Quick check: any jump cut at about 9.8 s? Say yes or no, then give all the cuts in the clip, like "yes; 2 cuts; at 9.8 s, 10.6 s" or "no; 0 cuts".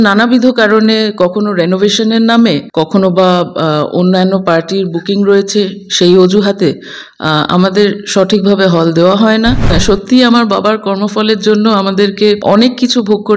yes; 3 cuts; at 2.7 s, 9.8 s, 12.4 s